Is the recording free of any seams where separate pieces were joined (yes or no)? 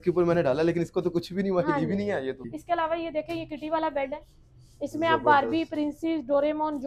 no